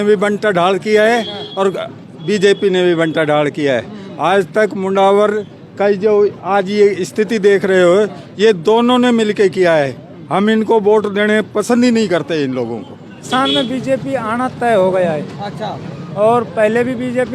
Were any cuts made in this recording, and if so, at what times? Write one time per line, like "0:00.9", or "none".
0:13.3

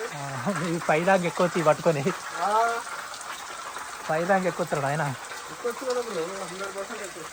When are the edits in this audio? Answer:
none

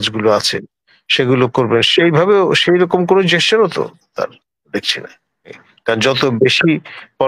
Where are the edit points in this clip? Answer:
0:05.7

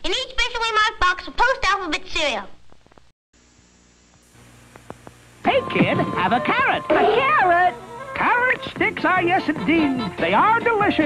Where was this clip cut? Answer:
0:03.2

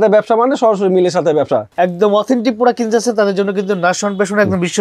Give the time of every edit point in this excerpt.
0:01.7

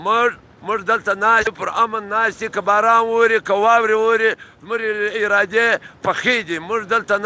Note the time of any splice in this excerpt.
0:01.4

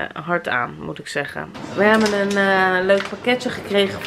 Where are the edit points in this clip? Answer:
0:01.6

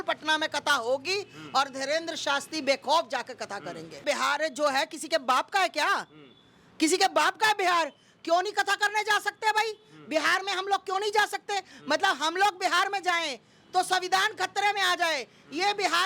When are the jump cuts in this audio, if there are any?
0:04.0

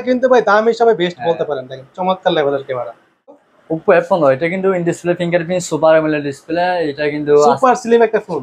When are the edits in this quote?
0:03.5

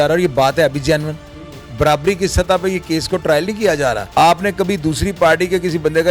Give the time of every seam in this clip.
0:04.0

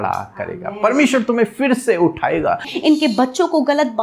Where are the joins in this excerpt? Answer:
0:02.7

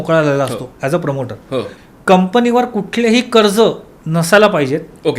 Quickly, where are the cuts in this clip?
0:01.7

